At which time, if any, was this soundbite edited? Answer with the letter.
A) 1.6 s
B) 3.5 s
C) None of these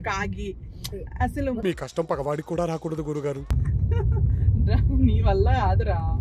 B